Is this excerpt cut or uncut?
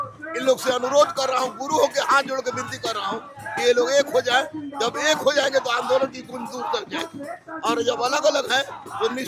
uncut